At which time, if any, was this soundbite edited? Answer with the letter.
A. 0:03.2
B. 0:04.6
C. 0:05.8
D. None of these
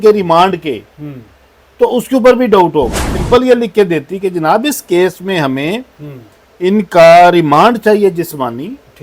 A